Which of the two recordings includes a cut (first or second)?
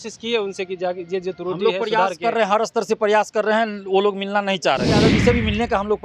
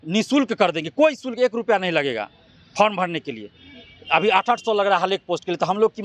first